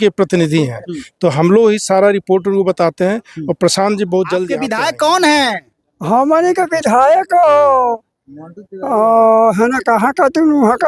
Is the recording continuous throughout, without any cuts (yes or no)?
no